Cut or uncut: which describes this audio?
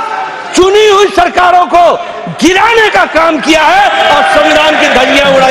uncut